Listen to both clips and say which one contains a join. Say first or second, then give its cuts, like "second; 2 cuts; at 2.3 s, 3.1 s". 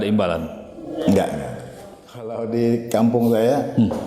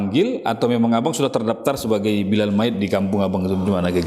first; 1 cut; at 2.4 s